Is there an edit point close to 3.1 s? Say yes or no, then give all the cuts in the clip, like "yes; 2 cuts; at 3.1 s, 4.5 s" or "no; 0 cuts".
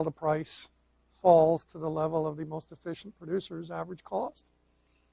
yes; 1 cut; at 3.1 s